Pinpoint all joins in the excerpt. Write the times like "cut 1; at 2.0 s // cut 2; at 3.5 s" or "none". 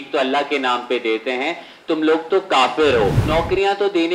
cut 1; at 3.2 s